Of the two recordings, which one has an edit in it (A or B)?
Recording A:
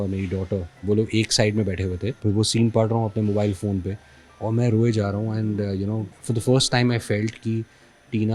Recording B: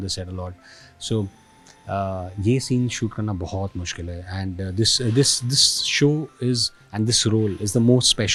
A